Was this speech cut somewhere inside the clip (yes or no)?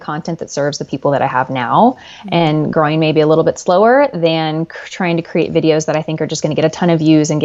no